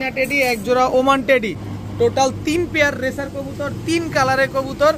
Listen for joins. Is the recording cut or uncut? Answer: cut